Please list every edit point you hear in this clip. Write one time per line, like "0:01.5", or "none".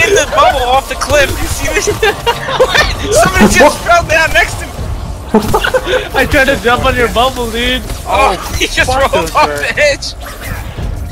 0:01.9